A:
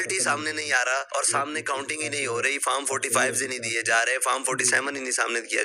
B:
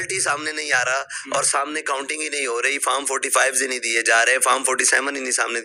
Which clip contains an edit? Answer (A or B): A